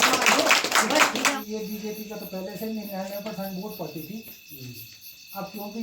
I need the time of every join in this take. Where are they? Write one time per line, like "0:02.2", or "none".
0:01.4